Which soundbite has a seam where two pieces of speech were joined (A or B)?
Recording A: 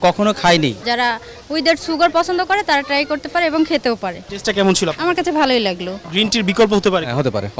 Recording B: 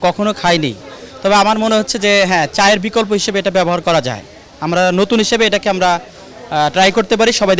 A